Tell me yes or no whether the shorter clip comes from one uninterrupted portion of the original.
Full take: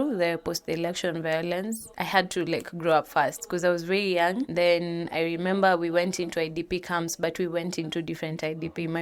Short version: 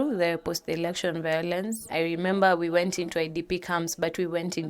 no